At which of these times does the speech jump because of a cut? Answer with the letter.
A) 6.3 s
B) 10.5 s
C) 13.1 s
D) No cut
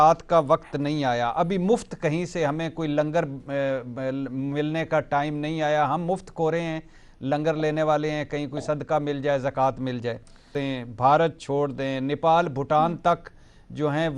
B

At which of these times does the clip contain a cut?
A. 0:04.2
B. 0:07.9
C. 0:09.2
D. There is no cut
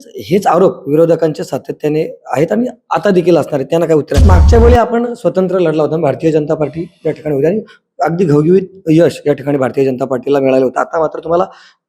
A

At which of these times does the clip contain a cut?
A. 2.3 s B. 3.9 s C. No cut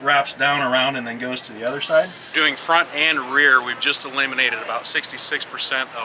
A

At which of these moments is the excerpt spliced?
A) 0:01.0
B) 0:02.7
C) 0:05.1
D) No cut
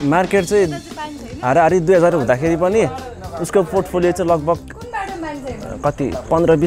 D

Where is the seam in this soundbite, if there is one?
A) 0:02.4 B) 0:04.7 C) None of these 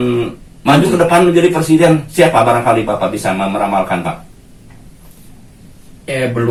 C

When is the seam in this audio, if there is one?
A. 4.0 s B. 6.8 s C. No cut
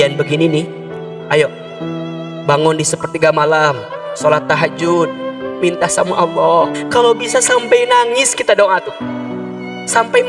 B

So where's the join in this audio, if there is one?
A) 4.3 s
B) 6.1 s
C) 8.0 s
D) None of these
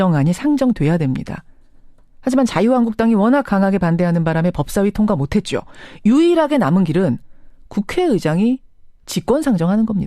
A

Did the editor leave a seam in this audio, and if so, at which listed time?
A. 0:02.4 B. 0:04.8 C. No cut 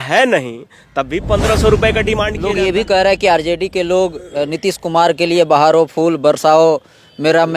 A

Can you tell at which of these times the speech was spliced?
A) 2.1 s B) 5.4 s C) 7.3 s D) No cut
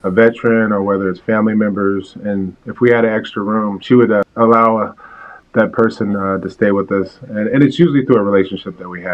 B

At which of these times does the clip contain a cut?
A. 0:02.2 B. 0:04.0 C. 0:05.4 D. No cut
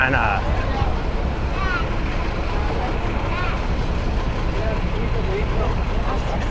D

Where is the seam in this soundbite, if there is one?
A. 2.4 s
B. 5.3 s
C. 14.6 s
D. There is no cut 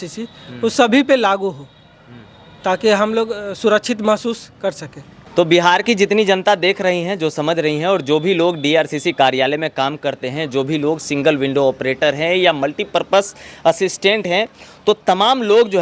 B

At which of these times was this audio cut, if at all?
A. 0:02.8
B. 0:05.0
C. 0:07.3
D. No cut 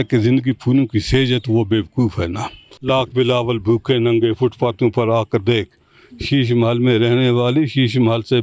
A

